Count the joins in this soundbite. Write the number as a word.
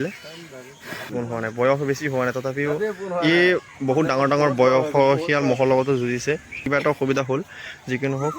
two